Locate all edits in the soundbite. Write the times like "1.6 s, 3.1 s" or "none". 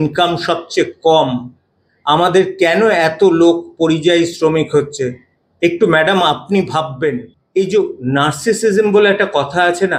7.3 s